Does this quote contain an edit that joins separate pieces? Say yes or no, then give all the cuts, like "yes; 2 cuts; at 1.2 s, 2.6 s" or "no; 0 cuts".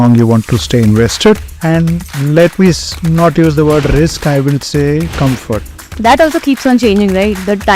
yes; 2 cuts; at 1.5 s, 5.9 s